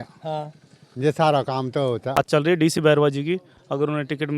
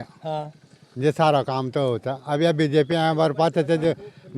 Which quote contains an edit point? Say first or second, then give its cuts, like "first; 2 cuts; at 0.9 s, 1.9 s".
first; 1 cut; at 2.2 s